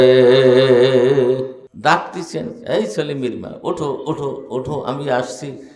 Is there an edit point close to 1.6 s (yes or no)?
yes